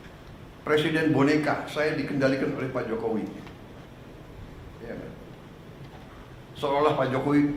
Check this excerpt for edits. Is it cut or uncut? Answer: uncut